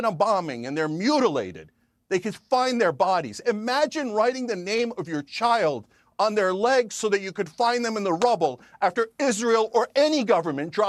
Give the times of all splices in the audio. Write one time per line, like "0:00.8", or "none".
none